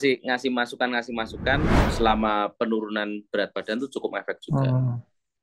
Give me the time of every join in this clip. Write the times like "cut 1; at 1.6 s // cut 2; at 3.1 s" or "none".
cut 1; at 1.8 s